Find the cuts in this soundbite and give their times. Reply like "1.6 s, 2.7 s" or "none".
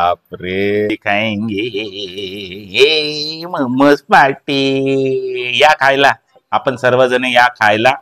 0.9 s